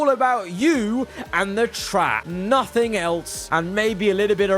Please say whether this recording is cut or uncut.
cut